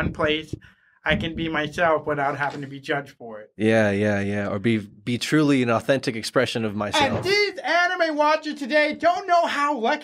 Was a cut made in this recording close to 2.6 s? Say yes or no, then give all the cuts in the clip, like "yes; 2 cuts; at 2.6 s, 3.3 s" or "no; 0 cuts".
no; 0 cuts